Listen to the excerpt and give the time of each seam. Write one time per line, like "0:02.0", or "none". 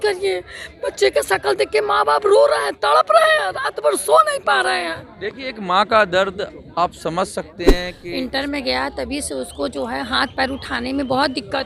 0:07.9

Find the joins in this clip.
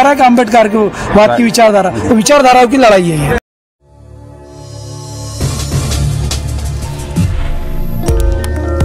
0:03.4

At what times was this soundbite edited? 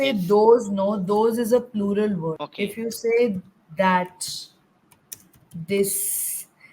0:02.4

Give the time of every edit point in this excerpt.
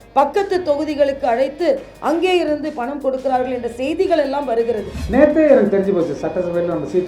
0:05.0

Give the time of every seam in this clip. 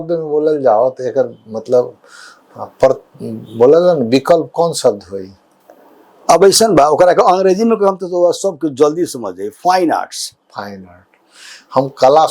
none

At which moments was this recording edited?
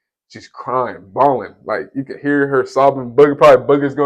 none

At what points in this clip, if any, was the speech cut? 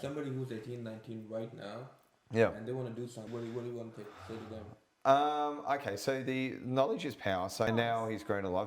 0:03.3
0:07.7

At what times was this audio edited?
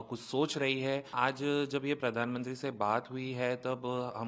0:01.1

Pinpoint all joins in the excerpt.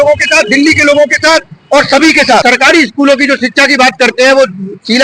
0:02.4

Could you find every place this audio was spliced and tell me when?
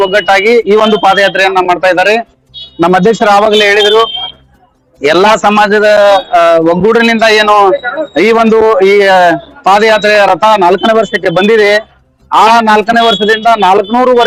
none

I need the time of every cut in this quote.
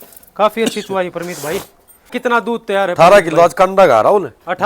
0:02.1

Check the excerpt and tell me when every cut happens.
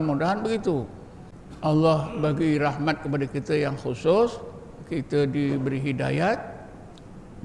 none

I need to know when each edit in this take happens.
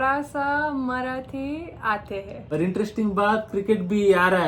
0:02.3

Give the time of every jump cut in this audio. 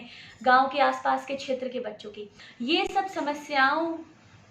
0:02.8

